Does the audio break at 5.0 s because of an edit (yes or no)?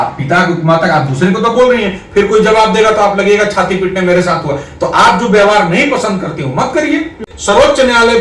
no